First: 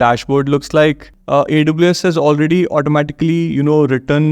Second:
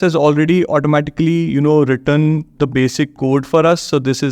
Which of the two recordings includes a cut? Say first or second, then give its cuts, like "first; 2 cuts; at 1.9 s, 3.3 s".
first; 1 cut; at 1.1 s